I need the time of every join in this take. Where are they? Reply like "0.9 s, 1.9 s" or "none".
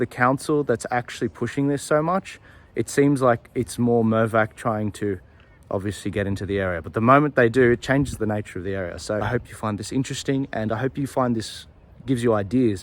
9.2 s